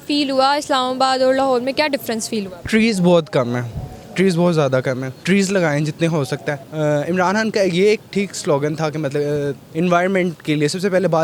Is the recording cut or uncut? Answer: cut